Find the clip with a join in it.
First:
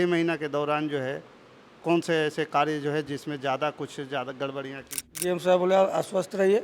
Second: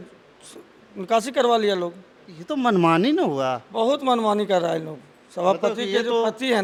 first; 1 cut; at 5.1 s

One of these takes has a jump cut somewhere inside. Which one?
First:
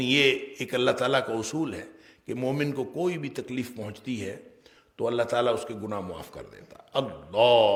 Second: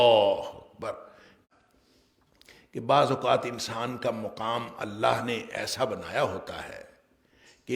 second; 1 cut; at 1.4 s

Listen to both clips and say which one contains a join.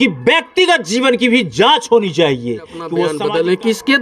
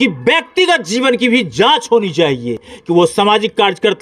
first; 1 cut; at 2.8 s

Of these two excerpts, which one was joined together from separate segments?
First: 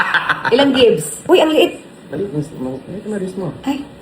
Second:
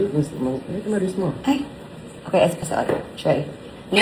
first; 1 cut; at 1.1 s

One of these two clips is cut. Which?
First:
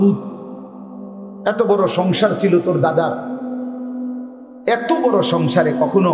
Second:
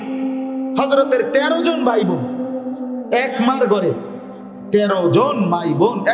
first; 2 cuts; at 3.2 s, 4.6 s

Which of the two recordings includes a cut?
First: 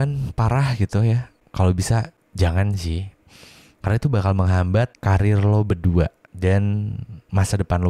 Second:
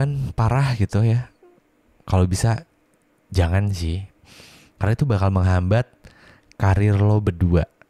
first; 4 cuts; at 1.4 s, 2.2 s, 5.0 s, 6.2 s

